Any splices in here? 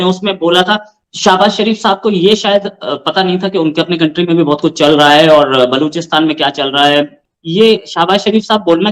yes; 2 cuts; at 1.0 s, 7.2 s

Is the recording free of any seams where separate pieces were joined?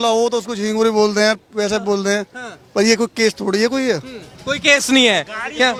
yes; 0 cuts

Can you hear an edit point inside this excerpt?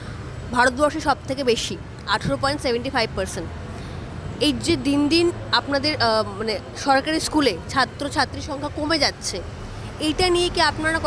no; 0 cuts

